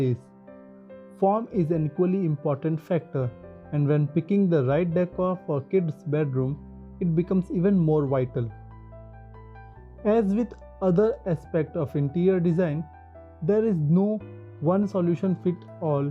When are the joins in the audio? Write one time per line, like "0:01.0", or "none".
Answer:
0:08.5
0:10.0